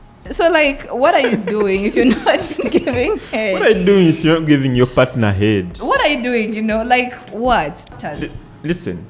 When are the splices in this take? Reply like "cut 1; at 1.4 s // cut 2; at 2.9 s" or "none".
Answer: cut 1; at 7.8 s